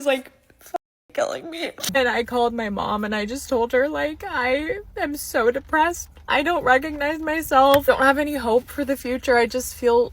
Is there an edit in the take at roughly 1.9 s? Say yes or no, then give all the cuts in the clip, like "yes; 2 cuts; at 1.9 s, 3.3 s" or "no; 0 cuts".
yes; 1 cut; at 1.9 s